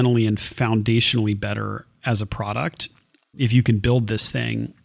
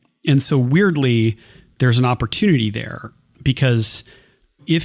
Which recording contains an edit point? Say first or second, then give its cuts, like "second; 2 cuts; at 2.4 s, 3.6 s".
first; 1 cut; at 3.2 s